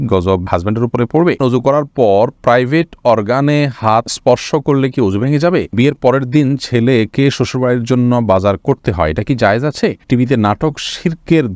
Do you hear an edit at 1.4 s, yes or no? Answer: yes